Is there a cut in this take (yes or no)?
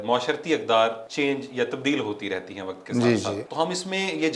yes